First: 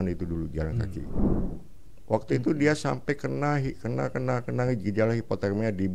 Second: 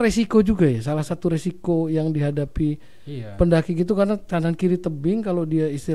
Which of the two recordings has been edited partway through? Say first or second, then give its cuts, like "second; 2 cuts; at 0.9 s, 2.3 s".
first; 1 cut; at 1.3 s